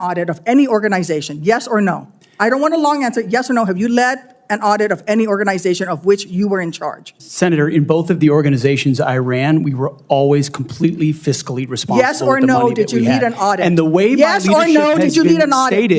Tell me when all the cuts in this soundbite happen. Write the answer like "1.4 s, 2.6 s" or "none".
none

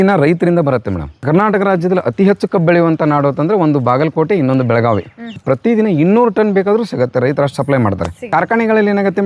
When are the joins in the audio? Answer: 1.1 s, 5.3 s, 8.3 s

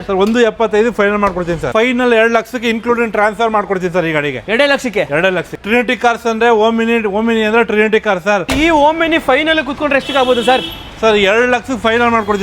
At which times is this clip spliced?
1.6 s, 5.6 s, 8.5 s

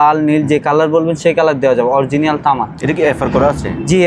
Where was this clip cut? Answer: none

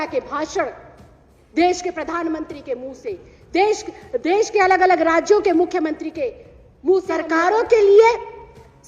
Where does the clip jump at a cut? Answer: 7.2 s

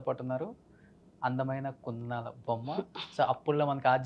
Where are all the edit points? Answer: none

